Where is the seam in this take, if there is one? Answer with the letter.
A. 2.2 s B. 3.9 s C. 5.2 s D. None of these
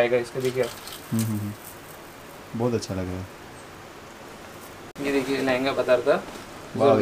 D